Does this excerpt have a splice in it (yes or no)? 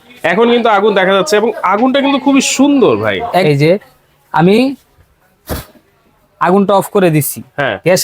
yes